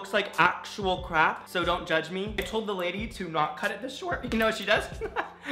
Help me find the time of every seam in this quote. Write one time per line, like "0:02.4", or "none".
0:02.4

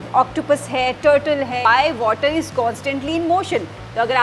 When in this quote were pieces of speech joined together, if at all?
0:01.6

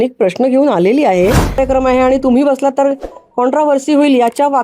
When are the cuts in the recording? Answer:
0:01.6

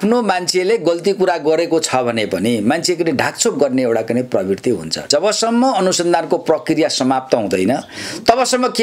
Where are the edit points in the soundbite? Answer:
0:05.1

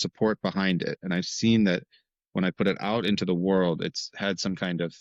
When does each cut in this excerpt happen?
none

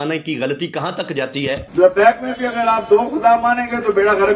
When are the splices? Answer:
0:01.6

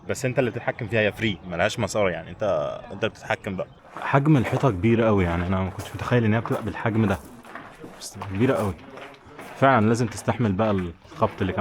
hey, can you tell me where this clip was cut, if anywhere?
0:03.7

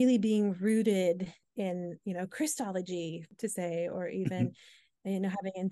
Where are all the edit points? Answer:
0:01.4
0:03.2

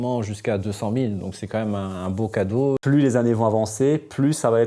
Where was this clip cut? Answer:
0:02.8

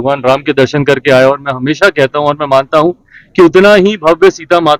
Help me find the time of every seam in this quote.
none

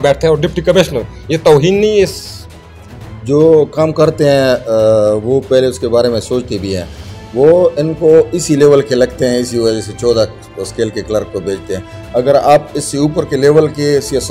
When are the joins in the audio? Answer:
none

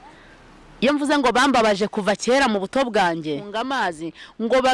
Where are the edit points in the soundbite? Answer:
0:03.5

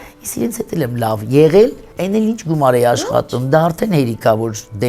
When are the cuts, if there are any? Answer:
0:01.9

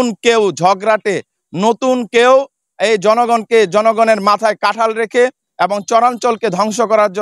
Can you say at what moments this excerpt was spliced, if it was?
none

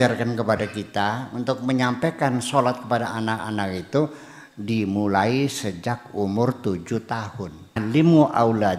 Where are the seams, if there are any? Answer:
0:07.8

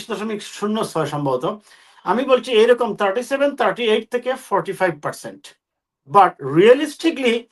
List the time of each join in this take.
none

